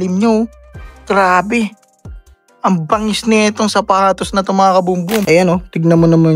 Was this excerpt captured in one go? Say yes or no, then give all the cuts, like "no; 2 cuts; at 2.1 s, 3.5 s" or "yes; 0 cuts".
no; 1 cut; at 5.2 s